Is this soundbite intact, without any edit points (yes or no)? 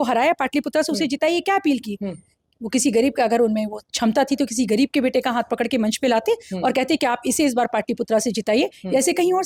yes